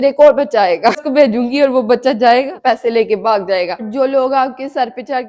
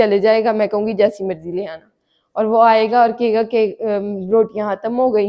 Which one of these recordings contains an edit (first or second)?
first